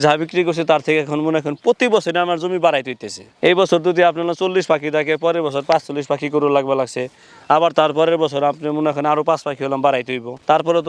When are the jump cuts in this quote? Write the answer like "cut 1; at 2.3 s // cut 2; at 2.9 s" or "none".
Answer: none